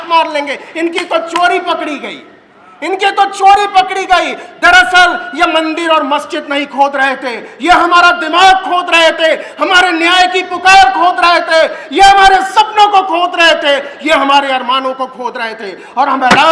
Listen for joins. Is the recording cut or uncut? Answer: uncut